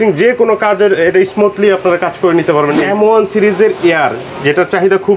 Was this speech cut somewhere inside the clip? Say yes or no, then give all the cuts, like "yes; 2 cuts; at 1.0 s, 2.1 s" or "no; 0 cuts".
yes; 1 cut; at 2.8 s